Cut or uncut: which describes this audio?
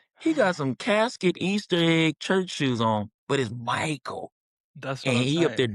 uncut